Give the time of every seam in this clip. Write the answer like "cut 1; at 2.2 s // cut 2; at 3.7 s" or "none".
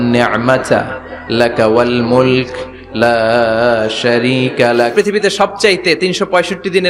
cut 1; at 4.9 s